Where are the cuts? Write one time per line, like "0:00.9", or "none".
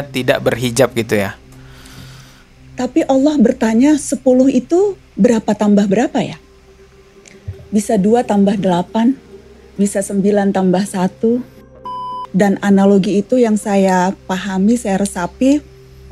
0:11.7